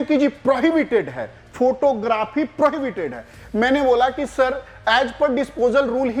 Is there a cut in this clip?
no; 0 cuts

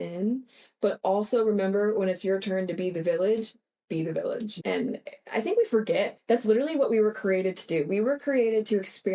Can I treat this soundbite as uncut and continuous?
no; 1 cut; at 4.5 s

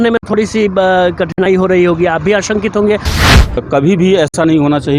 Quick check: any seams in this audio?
yes; 1 cut; at 3.6 s

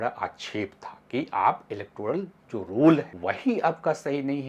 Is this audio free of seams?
no; 1 cut; at 3.1 s

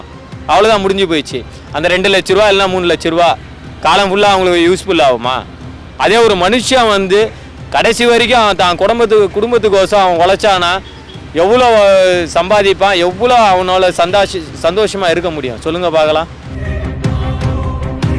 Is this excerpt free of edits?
yes; 0 cuts

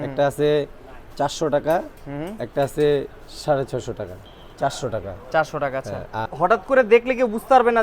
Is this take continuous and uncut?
no; 2 cuts; at 4.2 s, 6.2 s

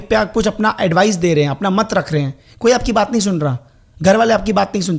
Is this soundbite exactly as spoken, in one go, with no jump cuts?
yes; 0 cuts

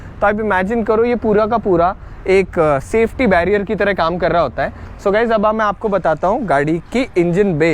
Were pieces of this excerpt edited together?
yes; 1 cut; at 4.9 s

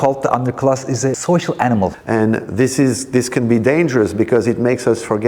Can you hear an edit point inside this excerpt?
yes; 2 cuts; at 1.2 s, 2.0 s

